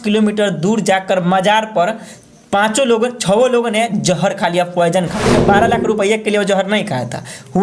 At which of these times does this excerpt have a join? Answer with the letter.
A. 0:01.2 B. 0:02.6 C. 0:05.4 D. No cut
C